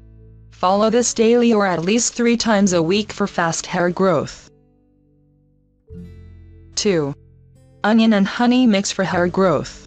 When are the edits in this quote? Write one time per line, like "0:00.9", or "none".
none